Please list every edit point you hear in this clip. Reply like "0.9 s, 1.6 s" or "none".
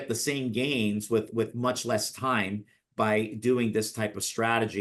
none